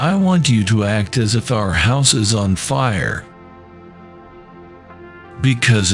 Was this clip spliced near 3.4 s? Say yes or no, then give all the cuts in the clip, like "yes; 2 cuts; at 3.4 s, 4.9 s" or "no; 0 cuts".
no; 0 cuts